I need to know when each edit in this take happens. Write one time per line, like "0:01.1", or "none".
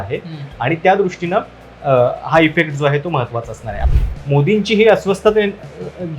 0:03.7